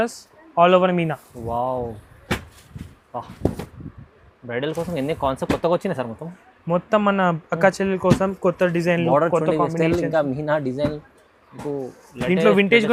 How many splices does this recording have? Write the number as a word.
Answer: zero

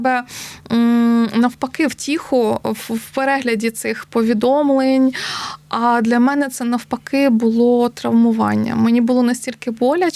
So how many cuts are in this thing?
zero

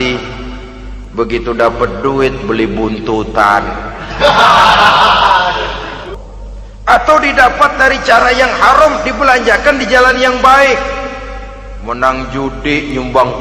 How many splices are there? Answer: one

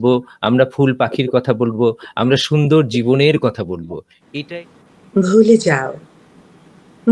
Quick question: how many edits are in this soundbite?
one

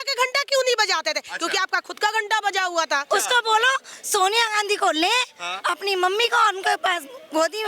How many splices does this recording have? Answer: one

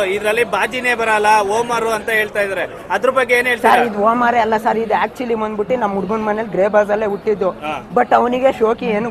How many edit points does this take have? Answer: zero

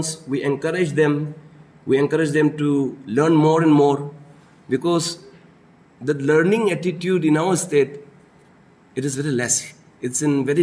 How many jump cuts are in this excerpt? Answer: zero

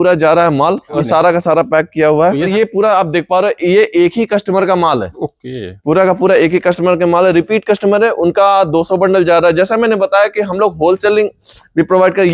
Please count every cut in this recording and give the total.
two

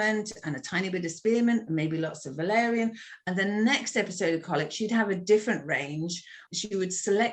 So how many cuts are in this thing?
one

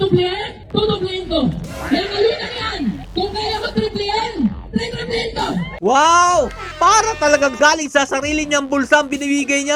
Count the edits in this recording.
zero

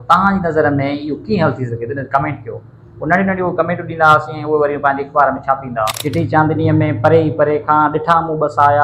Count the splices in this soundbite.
one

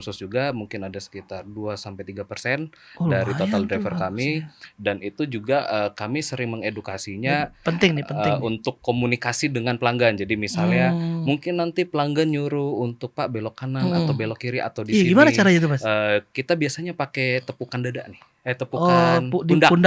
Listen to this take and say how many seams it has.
zero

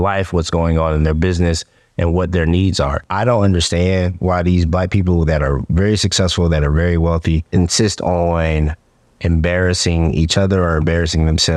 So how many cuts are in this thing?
two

